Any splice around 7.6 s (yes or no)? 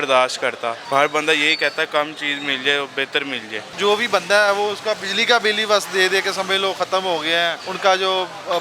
yes